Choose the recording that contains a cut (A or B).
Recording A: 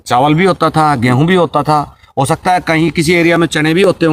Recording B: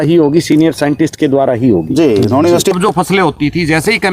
B